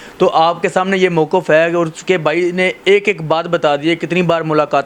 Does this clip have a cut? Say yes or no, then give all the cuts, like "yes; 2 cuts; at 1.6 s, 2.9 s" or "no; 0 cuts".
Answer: no; 0 cuts